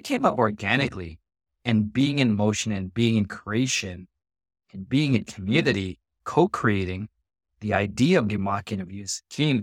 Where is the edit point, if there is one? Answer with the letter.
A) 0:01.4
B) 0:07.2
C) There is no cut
C